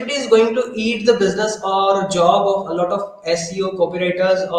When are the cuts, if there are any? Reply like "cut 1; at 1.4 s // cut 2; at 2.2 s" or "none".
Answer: none